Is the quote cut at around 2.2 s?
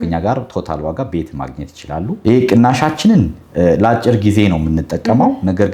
yes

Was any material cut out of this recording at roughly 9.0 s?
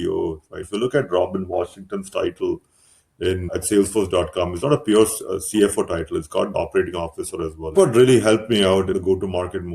yes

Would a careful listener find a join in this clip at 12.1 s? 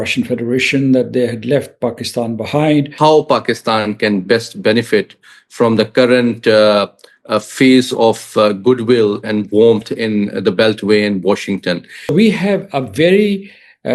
yes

